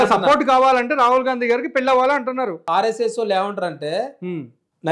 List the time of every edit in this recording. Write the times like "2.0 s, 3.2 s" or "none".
2.7 s